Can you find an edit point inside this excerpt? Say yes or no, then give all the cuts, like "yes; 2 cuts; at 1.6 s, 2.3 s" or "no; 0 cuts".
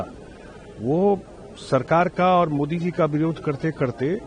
no; 0 cuts